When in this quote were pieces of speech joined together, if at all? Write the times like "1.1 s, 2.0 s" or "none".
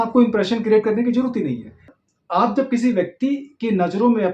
2.0 s